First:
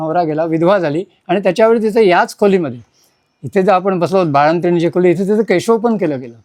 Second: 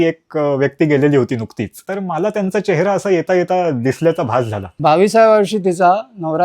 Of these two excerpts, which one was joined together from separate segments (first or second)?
second